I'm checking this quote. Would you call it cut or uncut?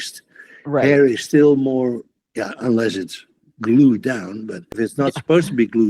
cut